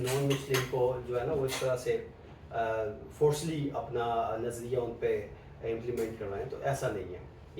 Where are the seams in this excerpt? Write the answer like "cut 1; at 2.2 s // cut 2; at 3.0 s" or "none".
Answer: none